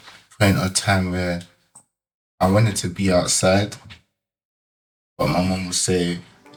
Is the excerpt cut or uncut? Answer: uncut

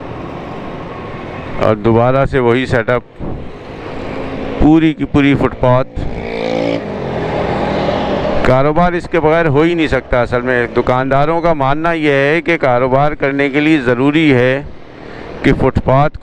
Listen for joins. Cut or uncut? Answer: uncut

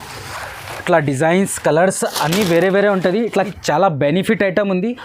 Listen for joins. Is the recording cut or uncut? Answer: cut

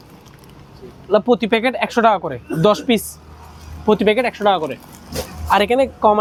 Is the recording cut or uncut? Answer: uncut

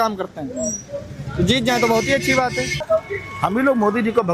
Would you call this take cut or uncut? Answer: cut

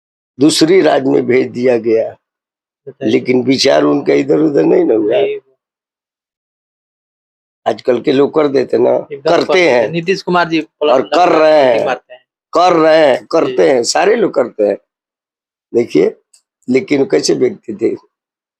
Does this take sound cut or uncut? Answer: uncut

